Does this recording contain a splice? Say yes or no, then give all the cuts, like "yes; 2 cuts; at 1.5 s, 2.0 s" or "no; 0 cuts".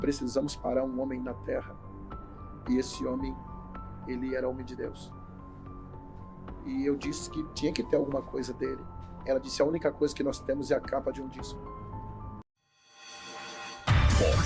yes; 1 cut; at 12.4 s